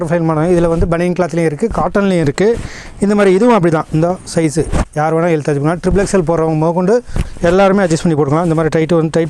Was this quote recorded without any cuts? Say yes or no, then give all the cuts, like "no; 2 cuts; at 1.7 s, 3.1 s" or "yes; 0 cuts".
yes; 0 cuts